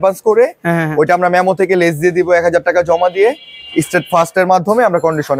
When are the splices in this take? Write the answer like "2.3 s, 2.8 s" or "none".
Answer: none